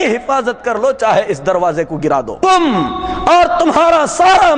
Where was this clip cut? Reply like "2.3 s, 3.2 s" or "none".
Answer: 2.3 s

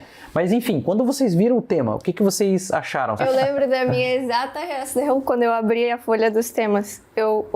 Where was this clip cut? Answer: 3.2 s

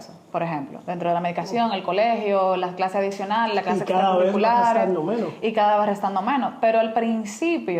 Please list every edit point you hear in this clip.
none

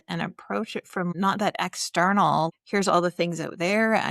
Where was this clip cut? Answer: 1.1 s, 2.5 s

